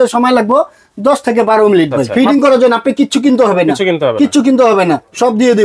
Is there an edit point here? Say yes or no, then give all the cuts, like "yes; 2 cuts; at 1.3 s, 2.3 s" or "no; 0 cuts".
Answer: yes; 1 cut; at 2.0 s